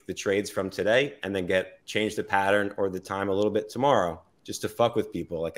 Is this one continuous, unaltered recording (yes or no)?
yes